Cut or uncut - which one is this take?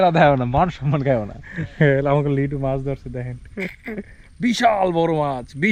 uncut